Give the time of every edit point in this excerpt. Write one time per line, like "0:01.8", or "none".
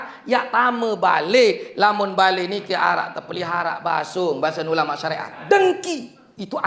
0:05.4

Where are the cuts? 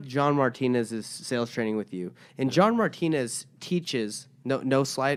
none

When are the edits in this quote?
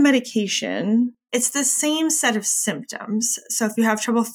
0:01.2

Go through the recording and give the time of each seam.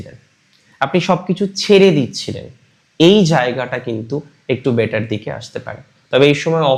none

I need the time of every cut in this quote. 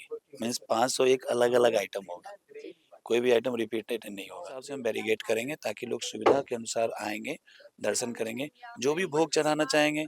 0:04.7

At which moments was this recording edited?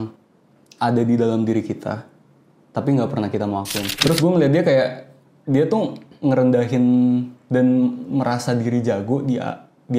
0:03.8

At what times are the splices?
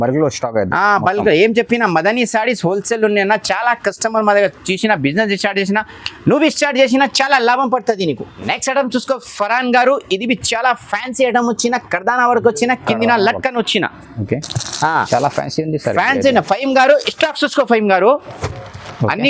none

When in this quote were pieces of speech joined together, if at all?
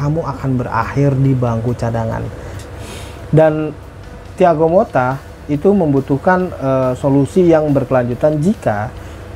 0:02.6

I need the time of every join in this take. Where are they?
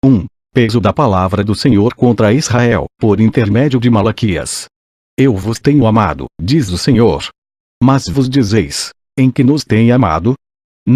none

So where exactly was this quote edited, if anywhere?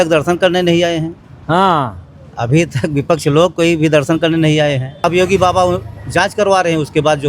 0:04.9

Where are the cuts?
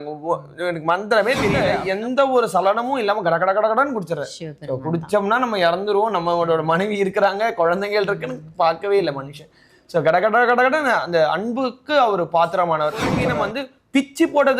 0:01.7
0:13.2

